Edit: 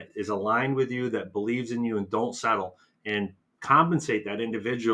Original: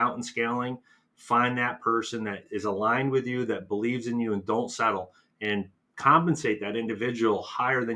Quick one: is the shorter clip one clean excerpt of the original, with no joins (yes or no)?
yes